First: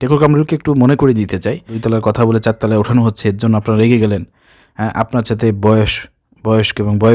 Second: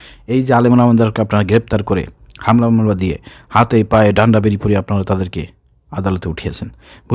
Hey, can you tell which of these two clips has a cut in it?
first; 1 cut; at 1.7 s

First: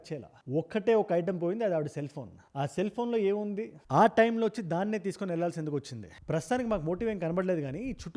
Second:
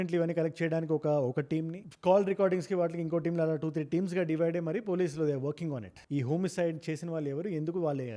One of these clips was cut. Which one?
first; 1 cut; at 6.2 s

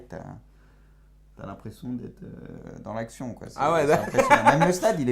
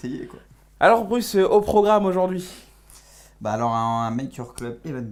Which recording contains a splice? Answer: first; 1 cut; at 1.1 s

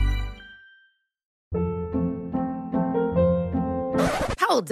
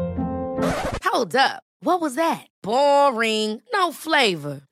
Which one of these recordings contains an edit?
first; 1 cut; at 1.3 s

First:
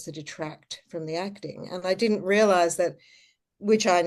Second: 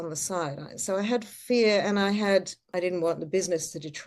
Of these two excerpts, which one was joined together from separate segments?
second; 1 cut; at 2.6 s

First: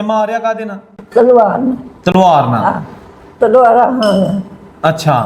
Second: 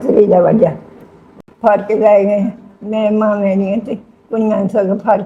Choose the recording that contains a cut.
second; 1 cut; at 1.3 s

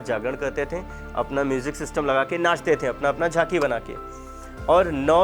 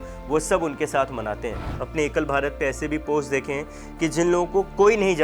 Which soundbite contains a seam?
second; 1 cut; at 1.8 s

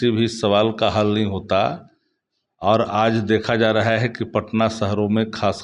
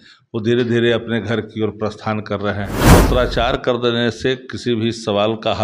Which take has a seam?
second; 1 cut; at 2.8 s

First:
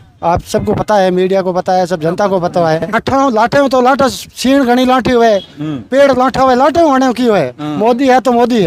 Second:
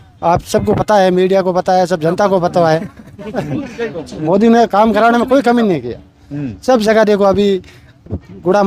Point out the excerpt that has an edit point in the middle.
first; 1 cut; at 2.9 s

